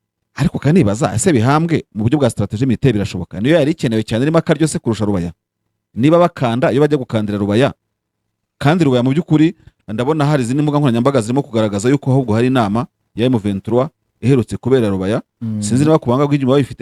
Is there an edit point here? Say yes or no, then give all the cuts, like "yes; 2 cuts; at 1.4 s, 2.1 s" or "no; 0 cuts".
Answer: no; 0 cuts